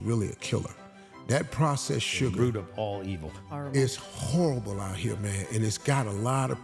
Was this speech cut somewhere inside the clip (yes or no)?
no